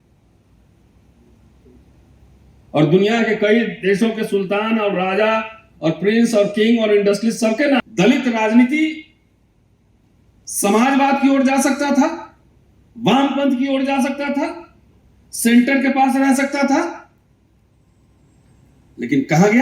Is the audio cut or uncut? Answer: cut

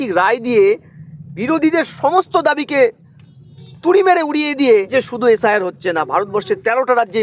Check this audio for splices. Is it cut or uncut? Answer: cut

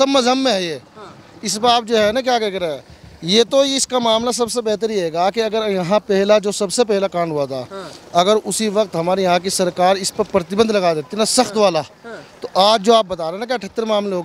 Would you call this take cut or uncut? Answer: uncut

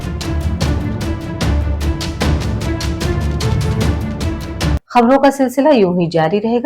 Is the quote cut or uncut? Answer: cut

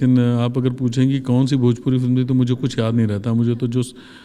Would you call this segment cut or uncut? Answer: uncut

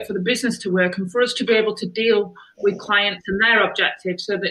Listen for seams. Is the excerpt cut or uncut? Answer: uncut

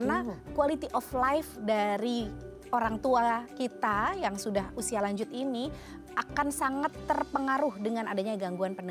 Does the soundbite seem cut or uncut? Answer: uncut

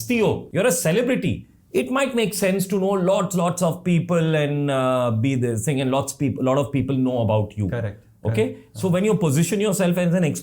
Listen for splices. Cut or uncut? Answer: uncut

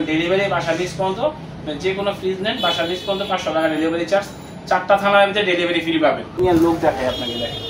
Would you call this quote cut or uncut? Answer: cut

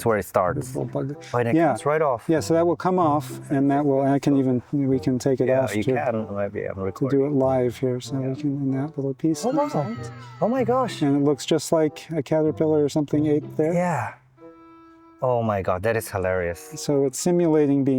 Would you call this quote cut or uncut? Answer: uncut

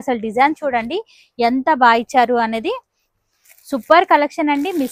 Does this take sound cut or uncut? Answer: uncut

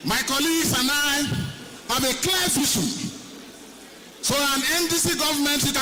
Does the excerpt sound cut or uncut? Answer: uncut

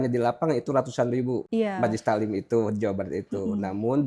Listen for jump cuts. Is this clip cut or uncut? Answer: cut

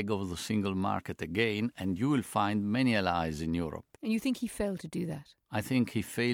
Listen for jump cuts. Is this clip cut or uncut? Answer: uncut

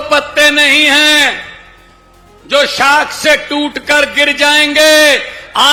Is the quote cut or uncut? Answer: uncut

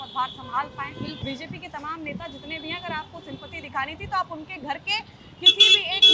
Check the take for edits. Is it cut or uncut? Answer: cut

